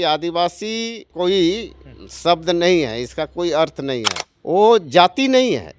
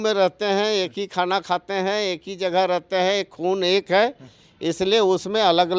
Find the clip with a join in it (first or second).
first